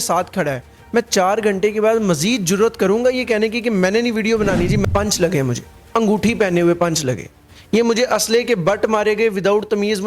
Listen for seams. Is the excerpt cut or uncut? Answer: cut